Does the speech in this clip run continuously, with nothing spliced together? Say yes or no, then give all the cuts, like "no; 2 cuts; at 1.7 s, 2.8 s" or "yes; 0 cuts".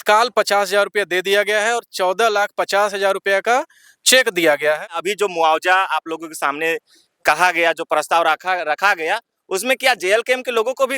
no; 1 cut; at 4.8 s